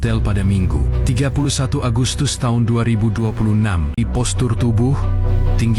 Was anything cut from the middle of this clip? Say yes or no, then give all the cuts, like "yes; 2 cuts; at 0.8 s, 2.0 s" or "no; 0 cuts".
yes; 1 cut; at 4.0 s